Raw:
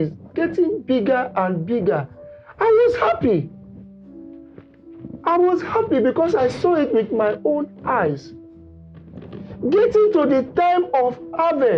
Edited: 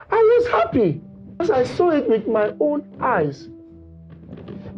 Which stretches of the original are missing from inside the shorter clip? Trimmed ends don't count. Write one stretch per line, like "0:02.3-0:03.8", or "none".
0:03.9-0:06.3

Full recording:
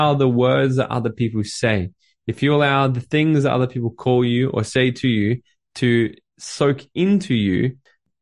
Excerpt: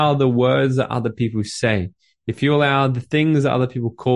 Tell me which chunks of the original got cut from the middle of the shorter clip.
none

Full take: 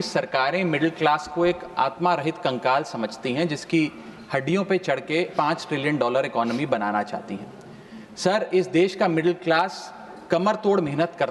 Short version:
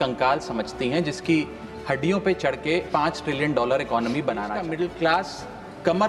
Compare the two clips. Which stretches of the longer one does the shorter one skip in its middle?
0:07.1-0:09.1

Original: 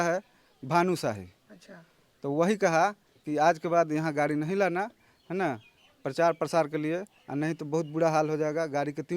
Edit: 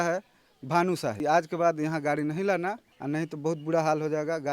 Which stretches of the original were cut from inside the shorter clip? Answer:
0:01.2-0:03.3
0:05.0-0:07.2

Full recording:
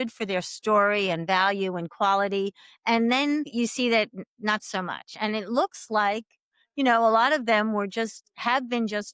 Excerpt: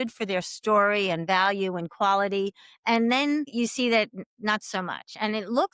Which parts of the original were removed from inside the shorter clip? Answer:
none

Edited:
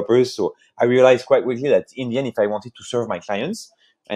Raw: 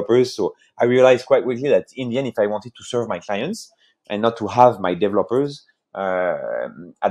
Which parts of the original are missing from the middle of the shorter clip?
none

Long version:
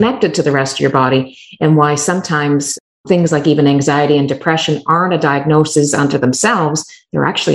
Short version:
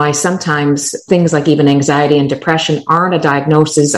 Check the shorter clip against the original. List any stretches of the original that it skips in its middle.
0:02.8-0:02.9

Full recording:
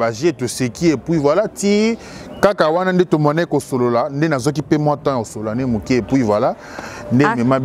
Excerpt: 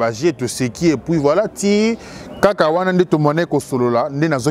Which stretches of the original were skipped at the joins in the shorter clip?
none

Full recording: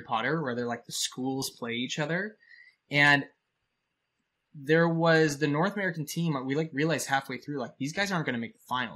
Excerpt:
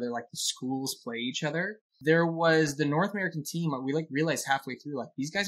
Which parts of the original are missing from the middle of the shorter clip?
0:02.4-0:04.5

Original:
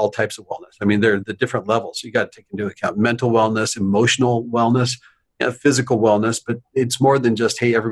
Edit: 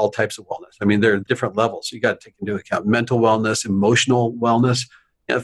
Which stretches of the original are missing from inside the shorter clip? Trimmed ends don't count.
0:01.2-0:01.3

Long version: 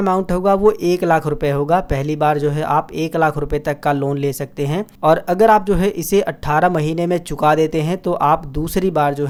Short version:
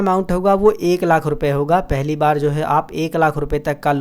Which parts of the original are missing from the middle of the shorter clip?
none

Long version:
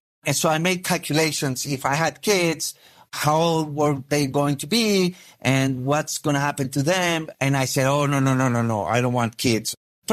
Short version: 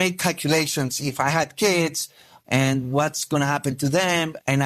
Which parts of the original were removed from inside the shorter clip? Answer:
0:03.0-0:05.3

